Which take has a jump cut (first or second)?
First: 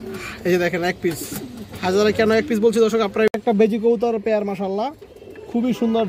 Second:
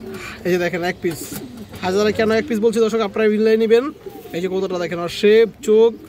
first